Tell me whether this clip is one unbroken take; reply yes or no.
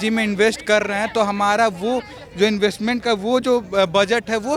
yes